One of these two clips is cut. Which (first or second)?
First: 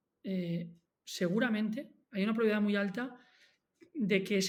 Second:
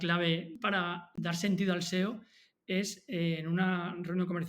second